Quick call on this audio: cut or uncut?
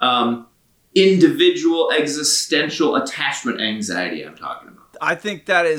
uncut